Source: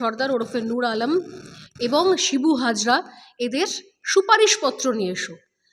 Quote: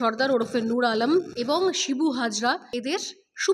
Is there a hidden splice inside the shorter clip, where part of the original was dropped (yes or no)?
yes